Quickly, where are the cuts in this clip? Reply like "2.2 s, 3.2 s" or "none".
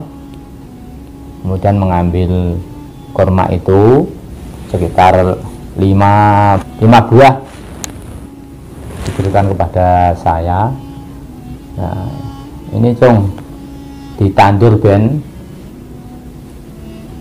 6.7 s